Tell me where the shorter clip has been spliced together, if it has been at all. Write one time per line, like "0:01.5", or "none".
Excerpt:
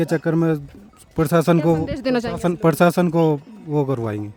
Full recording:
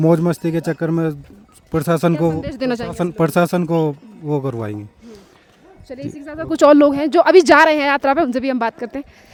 none